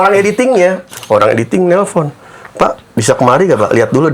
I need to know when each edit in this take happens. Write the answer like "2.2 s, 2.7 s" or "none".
0.9 s